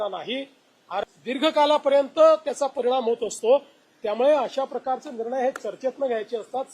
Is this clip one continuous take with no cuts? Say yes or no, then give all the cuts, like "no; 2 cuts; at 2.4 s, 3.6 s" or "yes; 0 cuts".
no; 1 cut; at 1.0 s